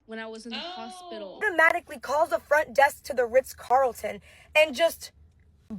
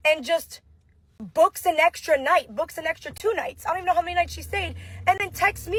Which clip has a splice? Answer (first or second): first